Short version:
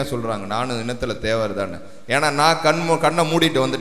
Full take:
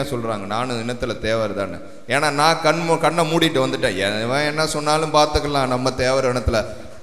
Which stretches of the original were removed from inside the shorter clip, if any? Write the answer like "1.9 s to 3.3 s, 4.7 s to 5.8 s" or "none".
none